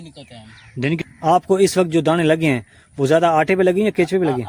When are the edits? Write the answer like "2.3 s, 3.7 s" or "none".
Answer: 1.0 s

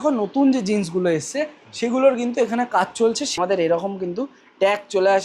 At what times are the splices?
3.3 s

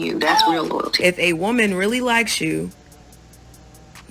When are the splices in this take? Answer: 1.0 s

